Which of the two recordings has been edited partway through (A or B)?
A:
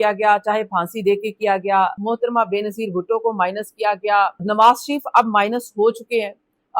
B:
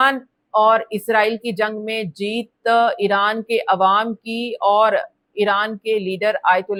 A